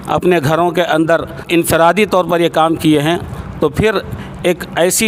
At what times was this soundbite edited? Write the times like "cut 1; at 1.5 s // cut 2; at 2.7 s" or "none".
cut 1; at 1.5 s